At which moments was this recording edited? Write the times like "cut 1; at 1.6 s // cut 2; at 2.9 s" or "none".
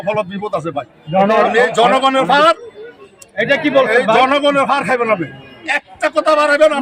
none

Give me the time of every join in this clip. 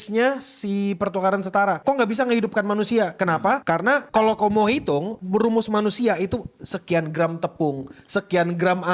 cut 1; at 1.8 s // cut 2; at 3.3 s // cut 3; at 5.1 s

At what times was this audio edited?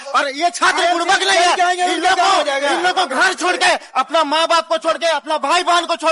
none

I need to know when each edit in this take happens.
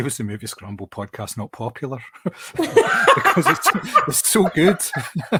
none

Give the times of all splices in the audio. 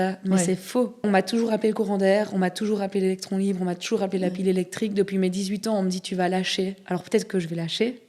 cut 1; at 1.0 s

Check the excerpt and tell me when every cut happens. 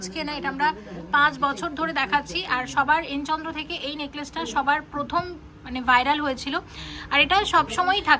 none

